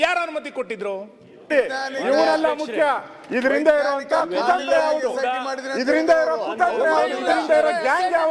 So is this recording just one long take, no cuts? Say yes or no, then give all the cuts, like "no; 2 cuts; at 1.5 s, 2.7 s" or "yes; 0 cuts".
no; 1 cut; at 1.5 s